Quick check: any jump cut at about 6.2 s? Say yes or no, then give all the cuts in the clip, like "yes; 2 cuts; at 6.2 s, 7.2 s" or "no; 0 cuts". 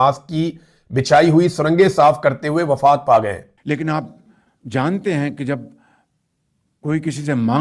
no; 1 cut; at 3.5 s